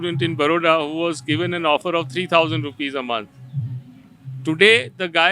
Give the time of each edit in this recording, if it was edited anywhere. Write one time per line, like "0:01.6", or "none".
none